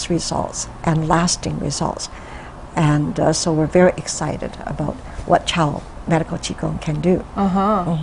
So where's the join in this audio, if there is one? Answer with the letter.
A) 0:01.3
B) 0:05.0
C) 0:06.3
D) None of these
C